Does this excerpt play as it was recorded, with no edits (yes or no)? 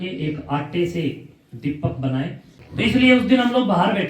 no